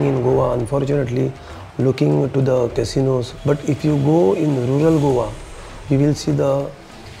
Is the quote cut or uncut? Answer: cut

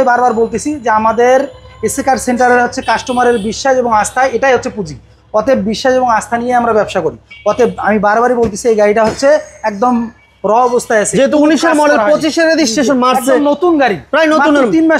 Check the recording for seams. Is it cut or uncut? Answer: uncut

